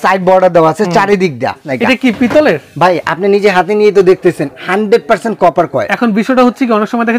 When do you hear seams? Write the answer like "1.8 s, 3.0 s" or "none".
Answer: 1.6 s